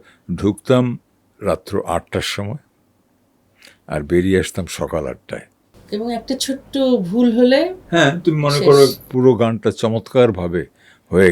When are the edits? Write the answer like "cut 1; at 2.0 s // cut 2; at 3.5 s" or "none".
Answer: none

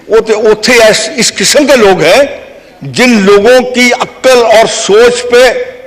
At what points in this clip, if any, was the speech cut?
none

